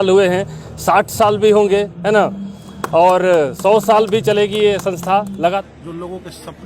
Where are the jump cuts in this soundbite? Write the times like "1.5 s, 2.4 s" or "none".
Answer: 5.5 s